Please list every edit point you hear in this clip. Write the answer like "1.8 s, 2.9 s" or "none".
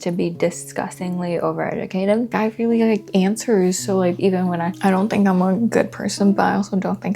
2.3 s, 4.7 s